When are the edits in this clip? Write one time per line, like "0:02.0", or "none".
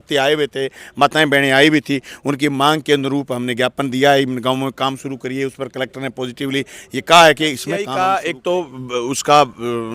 0:07.9